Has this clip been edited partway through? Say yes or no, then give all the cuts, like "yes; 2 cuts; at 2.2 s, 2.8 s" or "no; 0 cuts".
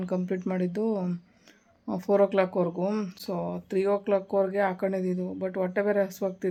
no; 0 cuts